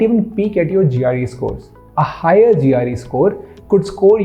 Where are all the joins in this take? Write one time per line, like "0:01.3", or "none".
none